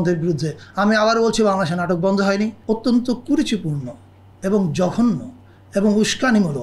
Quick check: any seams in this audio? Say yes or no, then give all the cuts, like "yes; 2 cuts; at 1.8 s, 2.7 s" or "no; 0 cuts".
yes; 1 cut; at 2.6 s